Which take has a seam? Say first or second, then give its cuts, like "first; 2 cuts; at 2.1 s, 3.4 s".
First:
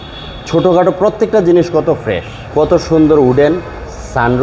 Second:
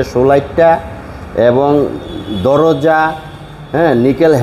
first; 1 cut; at 2.4 s